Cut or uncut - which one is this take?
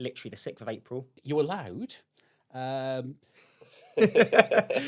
cut